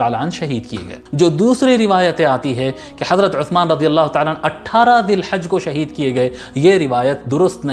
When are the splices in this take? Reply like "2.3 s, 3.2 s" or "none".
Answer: 1.0 s